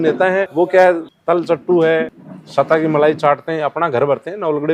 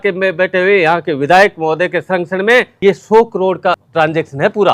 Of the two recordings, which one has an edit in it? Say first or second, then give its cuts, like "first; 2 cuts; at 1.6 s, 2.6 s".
second; 2 cuts; at 2.7 s, 3.8 s